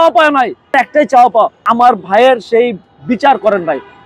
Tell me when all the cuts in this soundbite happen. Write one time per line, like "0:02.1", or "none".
0:00.7
0:01.7